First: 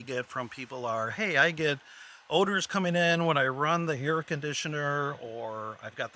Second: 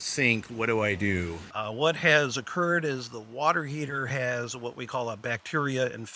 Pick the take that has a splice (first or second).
second